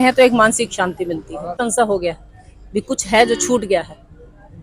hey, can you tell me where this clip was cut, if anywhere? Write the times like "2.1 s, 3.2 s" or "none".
1.6 s